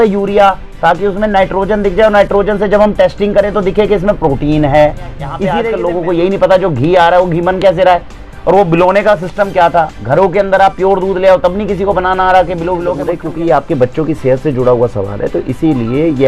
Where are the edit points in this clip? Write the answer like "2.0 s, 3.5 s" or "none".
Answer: 5.5 s, 13.1 s